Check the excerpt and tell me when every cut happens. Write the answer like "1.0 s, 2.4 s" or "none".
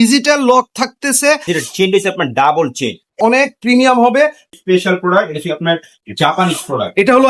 1.4 s, 3.2 s, 4.5 s